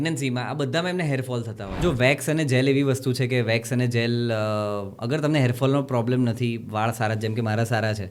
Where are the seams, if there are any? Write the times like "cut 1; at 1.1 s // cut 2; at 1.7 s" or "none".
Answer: cut 1; at 1.8 s